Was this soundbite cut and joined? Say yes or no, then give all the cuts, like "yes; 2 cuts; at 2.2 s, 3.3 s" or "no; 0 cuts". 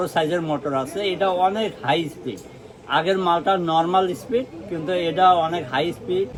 no; 0 cuts